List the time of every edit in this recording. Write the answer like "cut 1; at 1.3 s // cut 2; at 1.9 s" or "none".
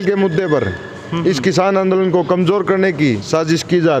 none